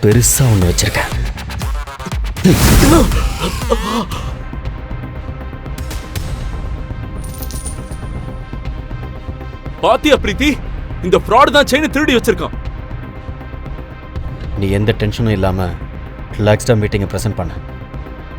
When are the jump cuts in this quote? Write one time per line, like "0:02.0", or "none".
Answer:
0:04.3
0:14.4

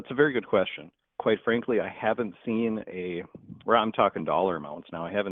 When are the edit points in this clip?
none

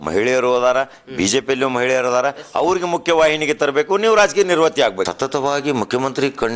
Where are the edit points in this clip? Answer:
0:05.1

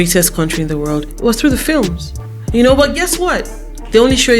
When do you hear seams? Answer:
0:02.2

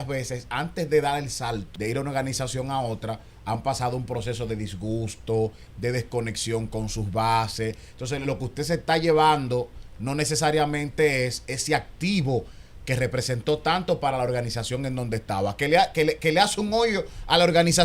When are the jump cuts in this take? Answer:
0:01.7

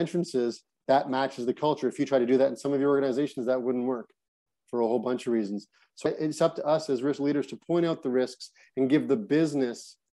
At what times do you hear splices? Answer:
none

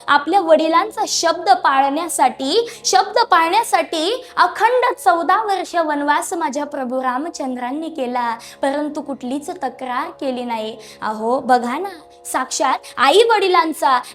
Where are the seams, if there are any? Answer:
none

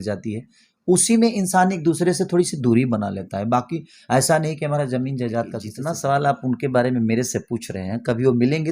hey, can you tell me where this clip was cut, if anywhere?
0:05.7

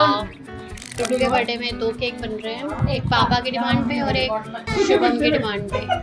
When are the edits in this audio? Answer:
0:00.9
0:02.8
0:04.7

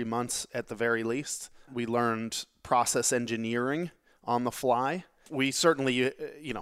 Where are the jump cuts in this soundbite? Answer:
0:01.7
0:05.2

